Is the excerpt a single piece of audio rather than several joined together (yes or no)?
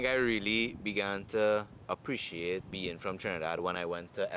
no